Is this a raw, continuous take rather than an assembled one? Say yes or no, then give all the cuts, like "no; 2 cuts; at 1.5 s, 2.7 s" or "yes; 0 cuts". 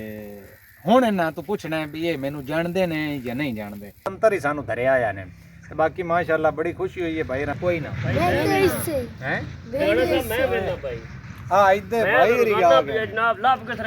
no; 2 cuts; at 4.1 s, 7.6 s